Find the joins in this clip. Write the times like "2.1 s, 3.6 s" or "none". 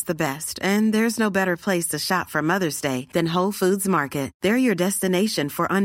none